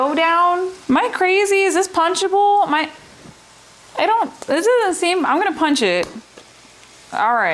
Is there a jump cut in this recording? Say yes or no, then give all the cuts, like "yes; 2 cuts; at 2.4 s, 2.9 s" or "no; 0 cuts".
no; 0 cuts